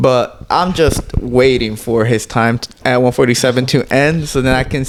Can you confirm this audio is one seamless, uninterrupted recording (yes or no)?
yes